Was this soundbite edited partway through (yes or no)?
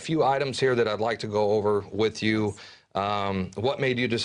yes